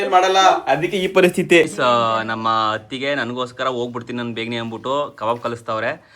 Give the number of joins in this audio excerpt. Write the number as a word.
one